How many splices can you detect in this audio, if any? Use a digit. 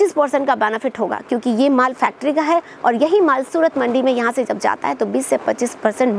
0